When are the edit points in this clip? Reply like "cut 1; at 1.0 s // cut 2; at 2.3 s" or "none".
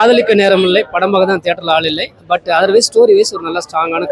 none